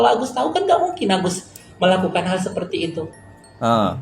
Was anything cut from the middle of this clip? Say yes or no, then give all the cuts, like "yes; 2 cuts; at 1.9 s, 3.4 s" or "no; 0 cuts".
no; 0 cuts